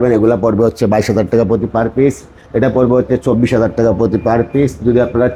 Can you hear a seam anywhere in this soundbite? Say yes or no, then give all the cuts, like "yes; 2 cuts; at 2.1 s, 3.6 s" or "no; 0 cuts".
no; 0 cuts